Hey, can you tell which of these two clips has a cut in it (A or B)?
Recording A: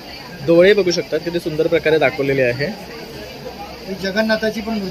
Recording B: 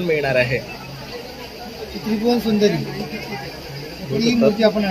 B